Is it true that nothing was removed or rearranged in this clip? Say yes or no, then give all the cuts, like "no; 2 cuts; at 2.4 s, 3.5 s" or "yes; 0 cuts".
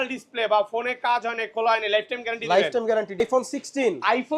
no; 1 cut; at 3.2 s